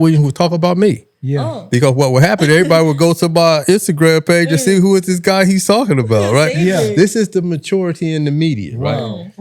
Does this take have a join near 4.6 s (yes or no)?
no